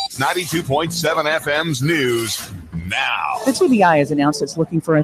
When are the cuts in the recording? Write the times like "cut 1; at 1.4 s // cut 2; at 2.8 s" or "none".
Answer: cut 1; at 0.9 s